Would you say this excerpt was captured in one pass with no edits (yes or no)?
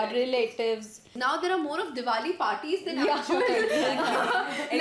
no